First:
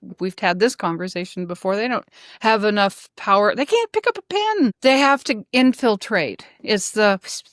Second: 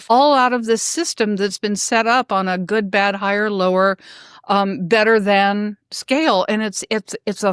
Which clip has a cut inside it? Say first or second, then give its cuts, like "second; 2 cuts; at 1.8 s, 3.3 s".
first; 1 cut; at 4.8 s